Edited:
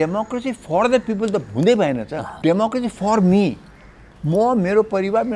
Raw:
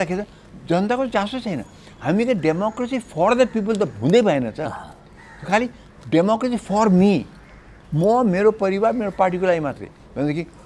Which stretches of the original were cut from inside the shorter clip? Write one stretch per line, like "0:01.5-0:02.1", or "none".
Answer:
0:04.7-0:05.9